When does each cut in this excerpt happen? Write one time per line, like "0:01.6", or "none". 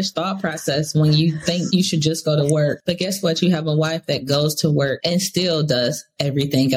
0:01.7
0:02.8
0:05.0